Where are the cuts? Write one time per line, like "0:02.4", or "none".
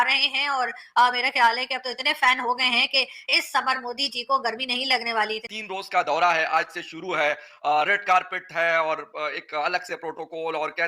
0:05.5